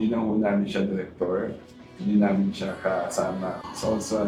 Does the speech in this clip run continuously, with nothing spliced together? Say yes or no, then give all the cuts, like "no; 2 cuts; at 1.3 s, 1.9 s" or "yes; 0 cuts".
yes; 0 cuts